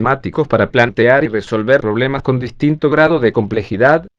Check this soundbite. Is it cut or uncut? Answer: uncut